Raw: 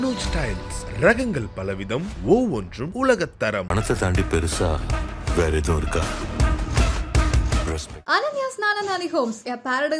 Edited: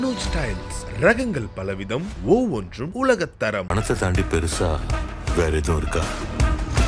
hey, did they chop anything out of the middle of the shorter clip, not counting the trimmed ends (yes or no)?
no